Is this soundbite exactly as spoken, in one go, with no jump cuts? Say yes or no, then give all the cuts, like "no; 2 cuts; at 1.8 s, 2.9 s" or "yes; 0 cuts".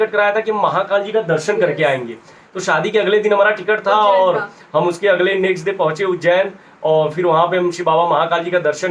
yes; 0 cuts